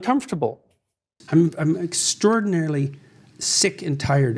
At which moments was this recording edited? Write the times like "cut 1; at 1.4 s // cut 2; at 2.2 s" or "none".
cut 1; at 1.2 s